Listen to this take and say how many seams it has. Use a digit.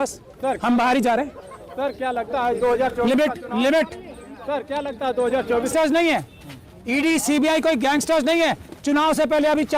1